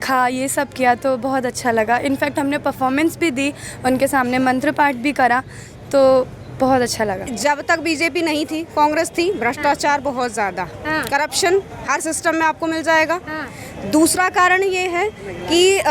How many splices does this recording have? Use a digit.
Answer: 1